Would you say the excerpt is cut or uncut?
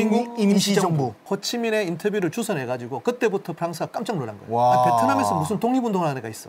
cut